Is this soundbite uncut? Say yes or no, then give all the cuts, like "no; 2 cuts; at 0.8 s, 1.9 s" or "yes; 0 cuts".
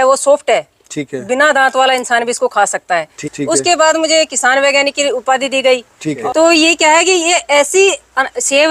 no; 2 cuts; at 3.2 s, 6.2 s